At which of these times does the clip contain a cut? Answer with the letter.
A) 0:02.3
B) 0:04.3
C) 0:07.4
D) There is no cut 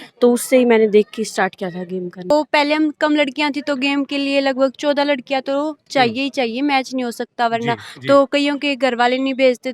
A